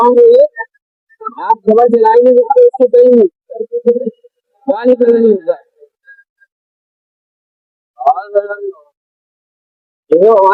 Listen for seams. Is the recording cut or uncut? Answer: uncut